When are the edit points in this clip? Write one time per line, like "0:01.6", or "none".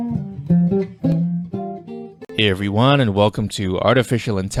none